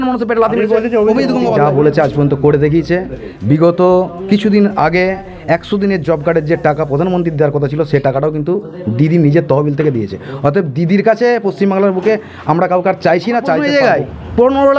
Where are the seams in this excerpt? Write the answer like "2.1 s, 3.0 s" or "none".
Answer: 1.6 s, 13.6 s